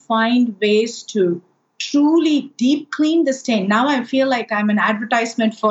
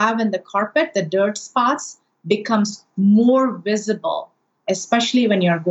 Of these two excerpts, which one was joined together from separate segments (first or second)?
second